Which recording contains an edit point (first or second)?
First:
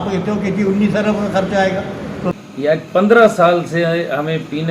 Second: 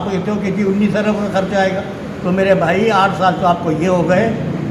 first